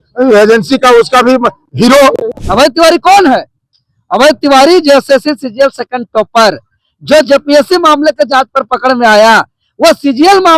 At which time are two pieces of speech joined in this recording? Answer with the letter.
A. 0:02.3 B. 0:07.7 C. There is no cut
A